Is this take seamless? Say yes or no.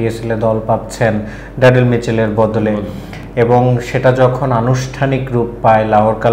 yes